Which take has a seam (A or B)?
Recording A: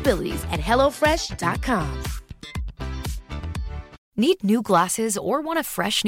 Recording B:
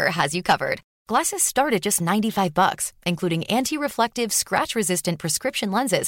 A